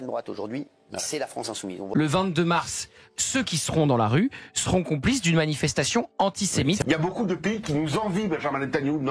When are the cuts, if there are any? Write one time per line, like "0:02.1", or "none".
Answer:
0:01.8
0:06.8